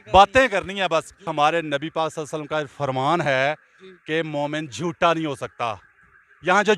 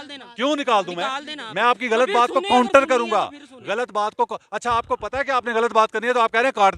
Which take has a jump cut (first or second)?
first